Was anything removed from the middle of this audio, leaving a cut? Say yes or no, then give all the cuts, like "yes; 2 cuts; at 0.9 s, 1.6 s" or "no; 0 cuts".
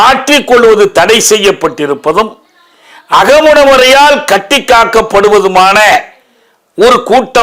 no; 0 cuts